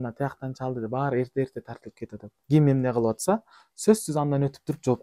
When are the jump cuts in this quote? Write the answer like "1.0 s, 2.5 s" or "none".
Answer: 2.3 s

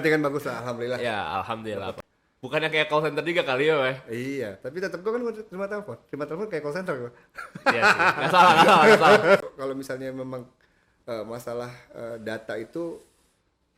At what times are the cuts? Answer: 2.0 s, 9.4 s

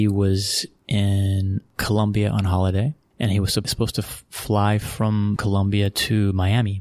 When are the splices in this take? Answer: 3.7 s, 5.4 s

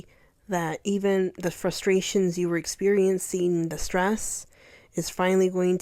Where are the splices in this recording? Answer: none

